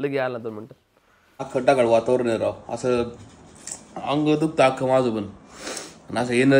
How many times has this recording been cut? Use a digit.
1